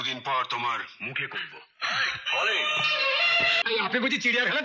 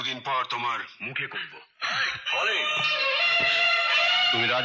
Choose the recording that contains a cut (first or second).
first